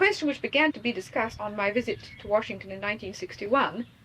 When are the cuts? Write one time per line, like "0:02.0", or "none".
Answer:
0:00.9